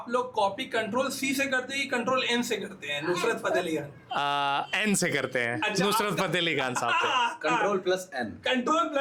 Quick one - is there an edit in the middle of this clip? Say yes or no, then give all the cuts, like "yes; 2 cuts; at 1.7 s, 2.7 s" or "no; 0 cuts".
no; 0 cuts